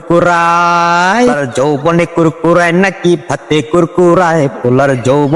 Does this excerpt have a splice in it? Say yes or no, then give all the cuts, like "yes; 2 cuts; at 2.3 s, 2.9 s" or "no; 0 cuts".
yes; 1 cut; at 1.4 s